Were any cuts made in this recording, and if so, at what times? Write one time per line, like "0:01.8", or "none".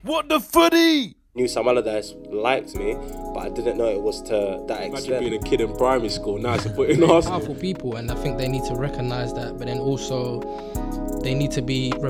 0:01.2